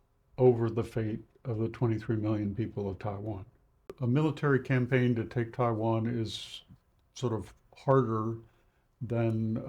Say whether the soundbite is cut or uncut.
cut